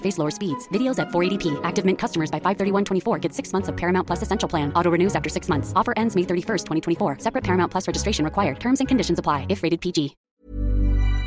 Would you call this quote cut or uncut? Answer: cut